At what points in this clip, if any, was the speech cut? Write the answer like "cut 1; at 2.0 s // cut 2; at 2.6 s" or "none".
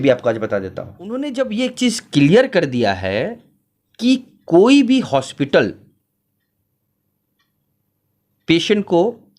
cut 1; at 1.2 s